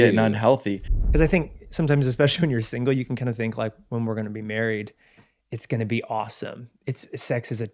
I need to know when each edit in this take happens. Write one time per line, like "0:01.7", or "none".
0:00.9